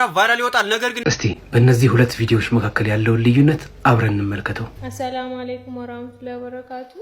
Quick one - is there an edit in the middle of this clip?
yes; 1 cut; at 1.0 s

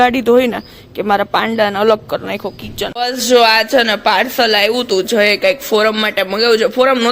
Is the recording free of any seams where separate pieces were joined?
no; 1 cut; at 2.9 s

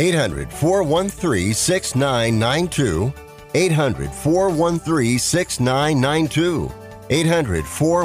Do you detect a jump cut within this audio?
no; 0 cuts

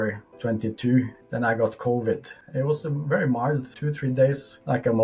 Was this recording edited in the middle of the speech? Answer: no; 0 cuts

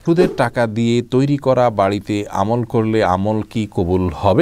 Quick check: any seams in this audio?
no; 0 cuts

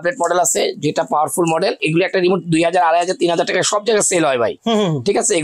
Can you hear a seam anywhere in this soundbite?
yes; 1 cut; at 1.8 s

